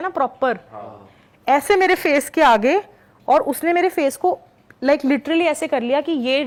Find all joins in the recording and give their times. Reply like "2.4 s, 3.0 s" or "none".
none